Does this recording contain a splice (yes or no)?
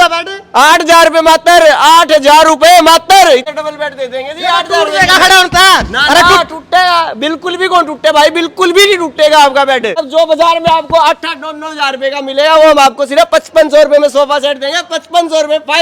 yes